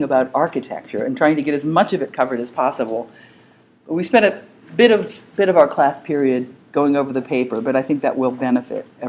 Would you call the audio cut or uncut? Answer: uncut